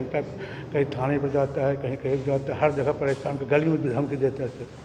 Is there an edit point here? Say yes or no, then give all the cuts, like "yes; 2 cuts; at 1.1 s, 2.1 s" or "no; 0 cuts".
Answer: no; 0 cuts